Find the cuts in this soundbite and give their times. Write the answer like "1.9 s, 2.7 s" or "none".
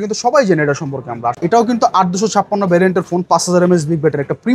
1.4 s

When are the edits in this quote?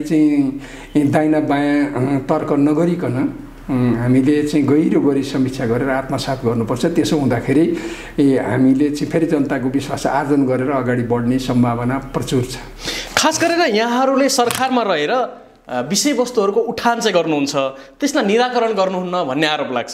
none

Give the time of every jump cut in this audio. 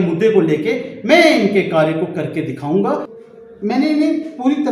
3.1 s

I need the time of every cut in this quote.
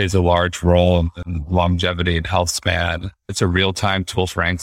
3.3 s

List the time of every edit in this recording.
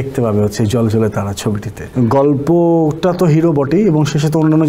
1.8 s

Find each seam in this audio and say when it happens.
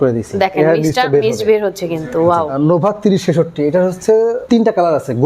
2.5 s, 4.4 s

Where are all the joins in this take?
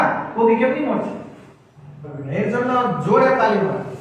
2.1 s

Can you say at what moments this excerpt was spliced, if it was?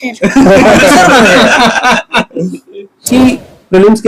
3.1 s

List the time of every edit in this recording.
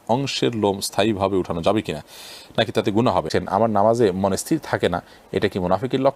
3.3 s

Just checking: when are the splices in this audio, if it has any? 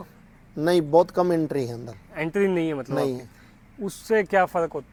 none

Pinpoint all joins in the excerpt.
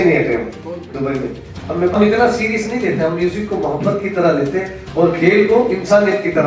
2.0 s

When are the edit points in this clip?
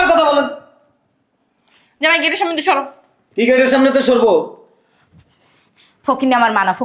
none

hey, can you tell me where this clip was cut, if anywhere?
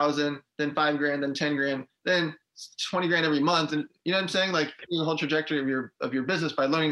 4.8 s

